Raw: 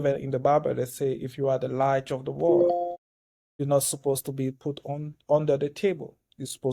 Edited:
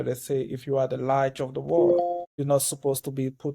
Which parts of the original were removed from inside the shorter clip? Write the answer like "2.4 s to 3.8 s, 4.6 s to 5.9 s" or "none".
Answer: 3.0 s to 3.5 s